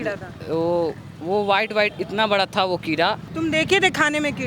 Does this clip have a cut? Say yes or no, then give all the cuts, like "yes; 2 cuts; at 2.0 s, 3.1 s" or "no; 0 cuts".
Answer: yes; 1 cut; at 3.3 s